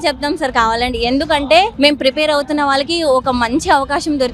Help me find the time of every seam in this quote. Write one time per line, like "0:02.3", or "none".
0:01.7